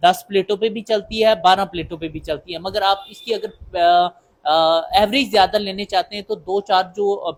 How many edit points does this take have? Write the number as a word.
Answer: zero